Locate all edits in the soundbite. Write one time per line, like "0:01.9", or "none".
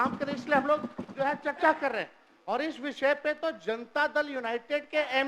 none